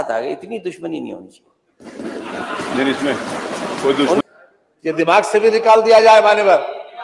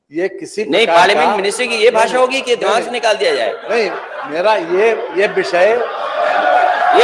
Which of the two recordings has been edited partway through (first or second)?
first